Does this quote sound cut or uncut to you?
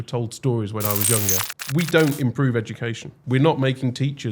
cut